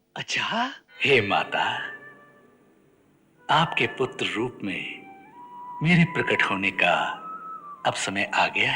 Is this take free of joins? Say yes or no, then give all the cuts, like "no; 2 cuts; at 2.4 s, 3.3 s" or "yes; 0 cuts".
no; 1 cut; at 1.1 s